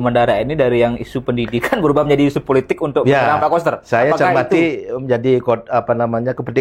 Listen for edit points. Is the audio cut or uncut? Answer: uncut